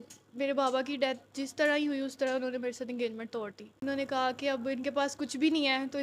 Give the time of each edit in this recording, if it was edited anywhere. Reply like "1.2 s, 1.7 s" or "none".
3.8 s

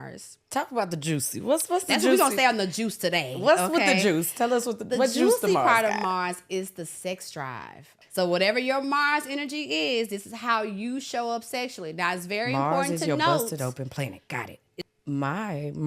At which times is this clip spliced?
8.0 s, 14.8 s

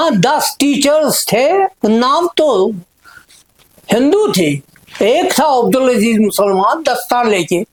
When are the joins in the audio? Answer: none

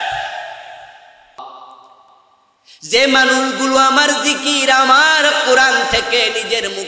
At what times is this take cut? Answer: 1.4 s

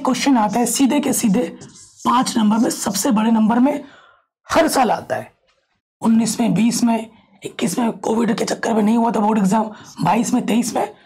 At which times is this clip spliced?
none

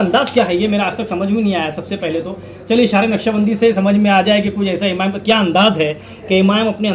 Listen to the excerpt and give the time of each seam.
none

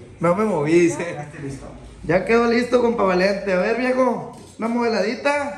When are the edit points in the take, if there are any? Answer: 1.2 s

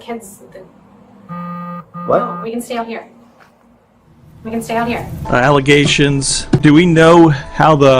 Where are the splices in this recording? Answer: 5.2 s

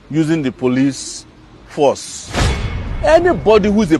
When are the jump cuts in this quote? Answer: 2.7 s

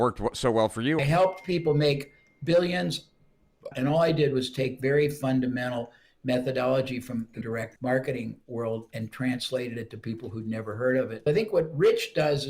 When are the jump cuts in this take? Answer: 1.0 s, 3.7 s, 7.4 s, 11.2 s

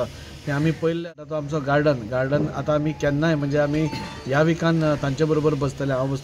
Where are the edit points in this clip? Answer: 1.4 s

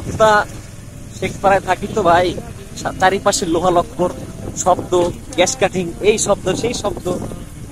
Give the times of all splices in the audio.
none

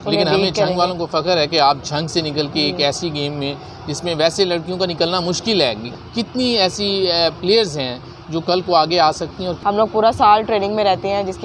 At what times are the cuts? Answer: 5.9 s, 9.5 s

